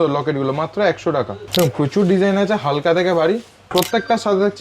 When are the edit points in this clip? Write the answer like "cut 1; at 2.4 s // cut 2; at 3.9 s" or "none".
cut 1; at 1.4 s // cut 2; at 3.6 s